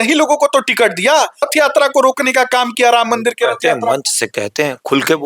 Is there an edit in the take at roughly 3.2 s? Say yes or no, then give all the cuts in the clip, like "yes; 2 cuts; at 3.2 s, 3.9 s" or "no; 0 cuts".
no; 1 cut; at 1.5 s